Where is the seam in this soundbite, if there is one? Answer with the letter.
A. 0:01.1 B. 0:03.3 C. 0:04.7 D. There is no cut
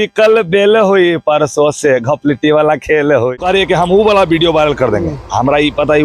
B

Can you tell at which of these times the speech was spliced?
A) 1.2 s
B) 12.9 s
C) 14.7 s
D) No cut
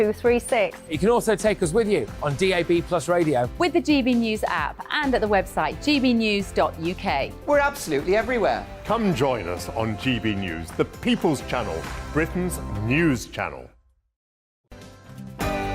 C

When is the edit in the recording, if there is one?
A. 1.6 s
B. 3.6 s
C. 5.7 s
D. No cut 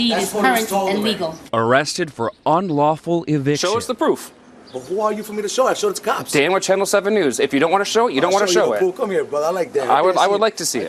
B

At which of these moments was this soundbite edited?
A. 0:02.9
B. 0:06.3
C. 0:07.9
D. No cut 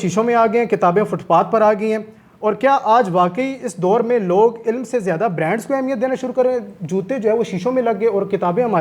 D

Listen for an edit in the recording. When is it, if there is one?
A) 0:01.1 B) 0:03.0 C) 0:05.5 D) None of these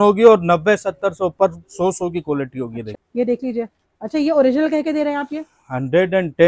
B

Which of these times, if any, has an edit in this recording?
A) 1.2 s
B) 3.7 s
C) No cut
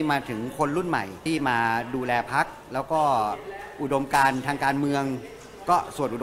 A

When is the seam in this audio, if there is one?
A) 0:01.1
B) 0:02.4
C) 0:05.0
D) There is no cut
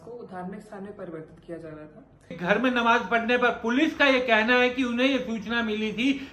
B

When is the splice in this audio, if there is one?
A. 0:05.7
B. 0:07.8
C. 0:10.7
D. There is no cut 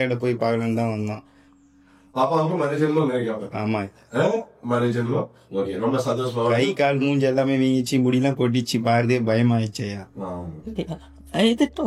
C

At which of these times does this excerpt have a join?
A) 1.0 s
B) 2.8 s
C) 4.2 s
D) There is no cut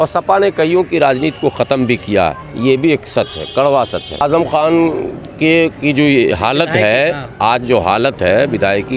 C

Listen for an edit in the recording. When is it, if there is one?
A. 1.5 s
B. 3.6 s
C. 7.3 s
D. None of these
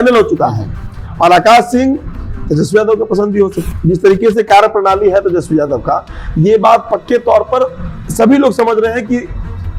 B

